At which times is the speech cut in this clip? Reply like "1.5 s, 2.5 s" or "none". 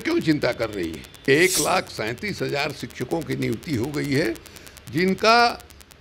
1.3 s